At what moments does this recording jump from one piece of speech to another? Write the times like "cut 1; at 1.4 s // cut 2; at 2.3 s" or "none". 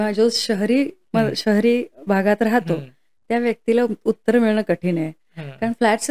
none